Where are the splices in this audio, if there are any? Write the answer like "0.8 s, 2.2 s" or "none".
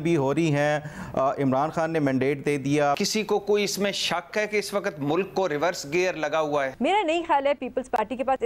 3.0 s, 6.7 s